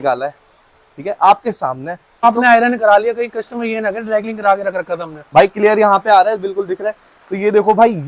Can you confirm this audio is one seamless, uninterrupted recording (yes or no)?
no